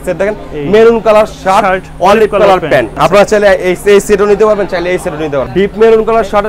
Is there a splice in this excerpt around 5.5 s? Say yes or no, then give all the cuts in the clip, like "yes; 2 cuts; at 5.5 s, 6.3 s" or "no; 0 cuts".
yes; 2 cuts; at 2.9 s, 5.5 s